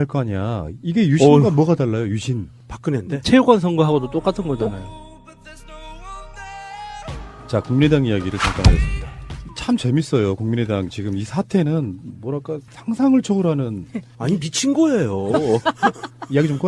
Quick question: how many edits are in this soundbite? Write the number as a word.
one